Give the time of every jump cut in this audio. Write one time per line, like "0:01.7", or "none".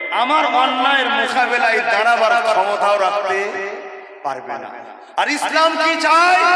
none